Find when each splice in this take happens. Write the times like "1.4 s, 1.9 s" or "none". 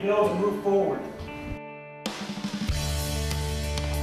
1.9 s